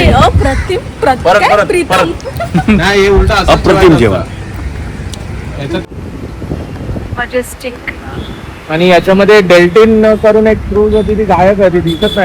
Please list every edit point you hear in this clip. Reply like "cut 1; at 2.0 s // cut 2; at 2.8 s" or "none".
cut 1; at 5.8 s